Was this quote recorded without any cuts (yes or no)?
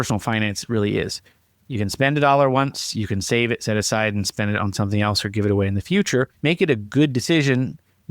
no